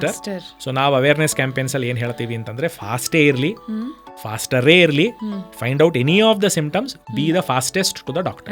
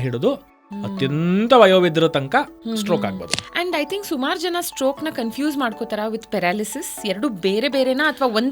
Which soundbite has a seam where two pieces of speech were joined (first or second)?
second